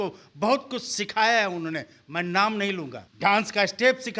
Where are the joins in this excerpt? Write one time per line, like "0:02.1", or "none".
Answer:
0:03.0